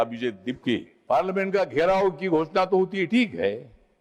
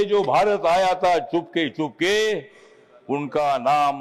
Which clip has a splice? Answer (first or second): first